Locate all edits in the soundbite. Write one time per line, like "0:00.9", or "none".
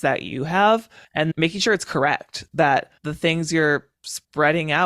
0:01.3
0:03.0